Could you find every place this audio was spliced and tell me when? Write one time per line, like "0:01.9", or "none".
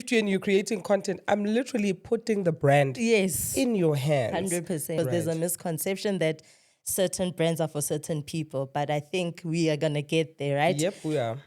0:04.9